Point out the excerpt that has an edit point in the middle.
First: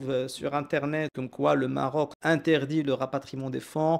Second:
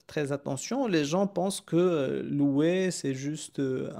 first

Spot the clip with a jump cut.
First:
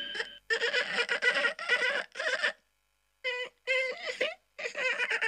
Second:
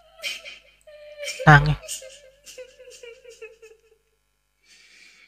second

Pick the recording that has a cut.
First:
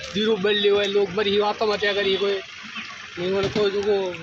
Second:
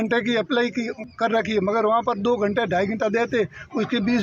second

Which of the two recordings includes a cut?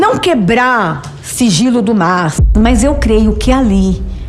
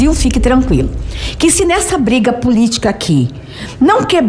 first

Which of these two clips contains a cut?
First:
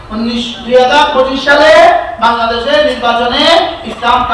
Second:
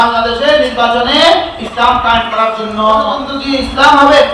second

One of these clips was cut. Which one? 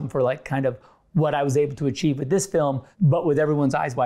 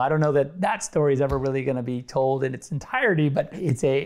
first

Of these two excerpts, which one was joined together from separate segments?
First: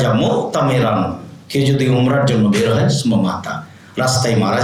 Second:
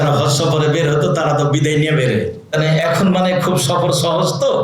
second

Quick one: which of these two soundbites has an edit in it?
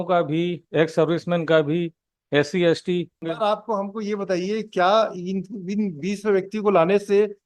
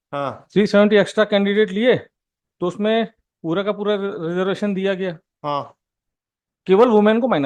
first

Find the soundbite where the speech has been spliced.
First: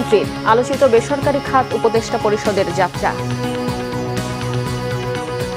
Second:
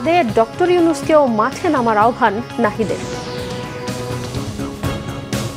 second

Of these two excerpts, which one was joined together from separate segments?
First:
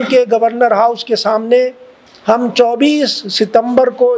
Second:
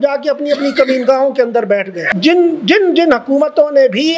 second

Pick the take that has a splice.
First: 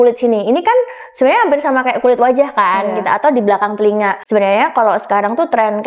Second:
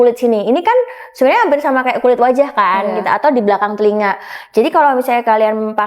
first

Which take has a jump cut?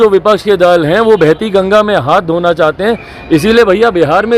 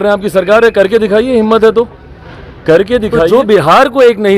second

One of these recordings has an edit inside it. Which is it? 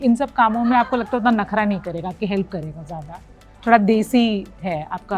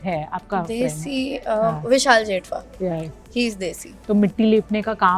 second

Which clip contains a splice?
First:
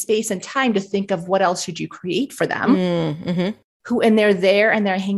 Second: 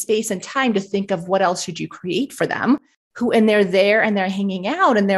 second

